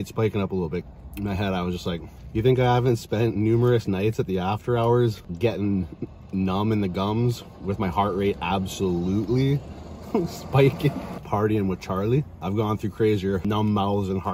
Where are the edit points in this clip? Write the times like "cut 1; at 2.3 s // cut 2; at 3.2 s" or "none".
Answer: cut 1; at 0.8 s // cut 2; at 2.2 s // cut 3; at 5.2 s // cut 4; at 11.1 s // cut 5; at 12.3 s // cut 6; at 13.4 s